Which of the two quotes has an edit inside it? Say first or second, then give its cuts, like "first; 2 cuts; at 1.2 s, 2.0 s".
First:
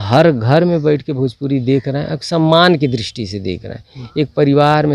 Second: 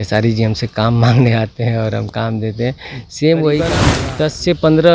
second; 1 cut; at 4.0 s